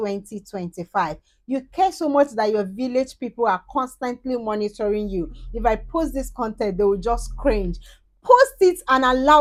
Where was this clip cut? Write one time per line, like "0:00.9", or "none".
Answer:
none